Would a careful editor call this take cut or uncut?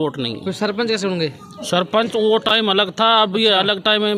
uncut